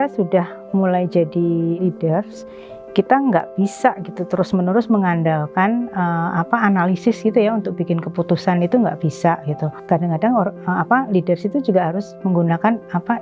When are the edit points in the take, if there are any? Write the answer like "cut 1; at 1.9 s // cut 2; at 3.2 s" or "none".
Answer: cut 1; at 1.8 s // cut 2; at 9.7 s